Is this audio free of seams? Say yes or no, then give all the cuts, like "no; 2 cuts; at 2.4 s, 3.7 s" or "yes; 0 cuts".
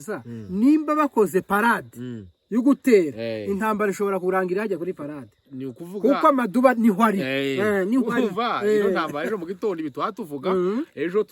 yes; 0 cuts